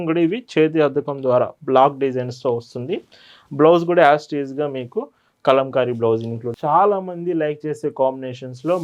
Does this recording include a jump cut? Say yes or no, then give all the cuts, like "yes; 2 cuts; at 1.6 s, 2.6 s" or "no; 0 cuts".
yes; 1 cut; at 6.4 s